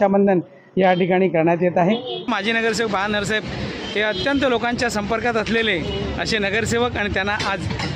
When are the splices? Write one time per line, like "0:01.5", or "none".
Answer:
0:02.3

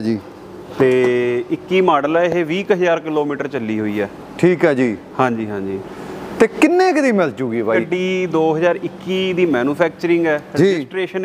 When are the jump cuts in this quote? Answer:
0:07.8

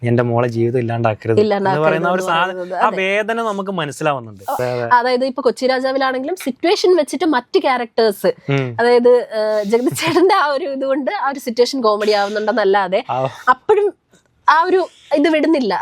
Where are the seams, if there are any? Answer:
0:04.6

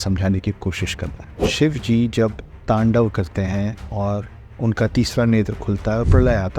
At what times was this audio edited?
0:01.3

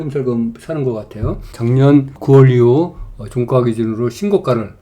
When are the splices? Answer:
0:01.5
0:02.1

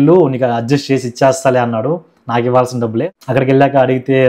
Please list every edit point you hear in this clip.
0:03.0

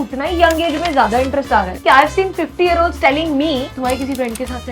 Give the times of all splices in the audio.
0:01.8
0:03.7

